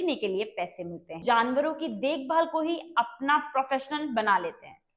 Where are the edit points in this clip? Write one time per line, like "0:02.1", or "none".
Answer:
0:01.2